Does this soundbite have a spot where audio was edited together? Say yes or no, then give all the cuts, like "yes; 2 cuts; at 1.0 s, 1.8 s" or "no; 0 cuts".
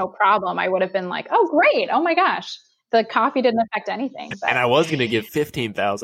yes; 1 cut; at 4.5 s